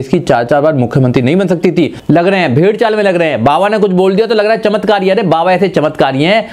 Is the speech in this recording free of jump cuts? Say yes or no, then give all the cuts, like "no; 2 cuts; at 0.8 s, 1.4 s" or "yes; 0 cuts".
no; 1 cut; at 2.0 s